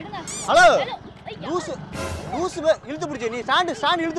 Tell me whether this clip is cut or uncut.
uncut